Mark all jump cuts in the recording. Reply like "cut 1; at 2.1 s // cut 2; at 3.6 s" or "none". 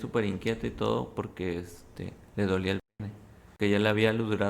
cut 1; at 3.6 s